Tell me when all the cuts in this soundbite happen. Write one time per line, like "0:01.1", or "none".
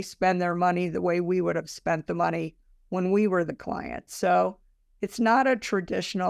none